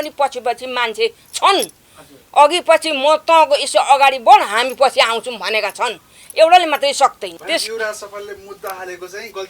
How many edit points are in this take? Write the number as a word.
one